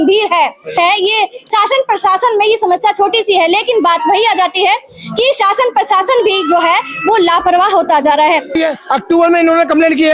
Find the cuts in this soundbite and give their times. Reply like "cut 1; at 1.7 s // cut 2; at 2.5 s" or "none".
cut 1; at 0.8 s // cut 2; at 8.5 s